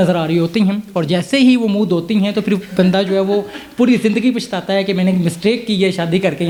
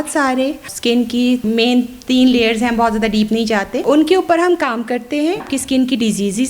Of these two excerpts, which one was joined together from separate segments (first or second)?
second